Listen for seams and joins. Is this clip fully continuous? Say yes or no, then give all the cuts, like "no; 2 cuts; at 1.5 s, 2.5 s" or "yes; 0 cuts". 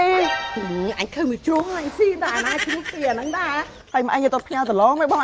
no; 1 cut; at 3.7 s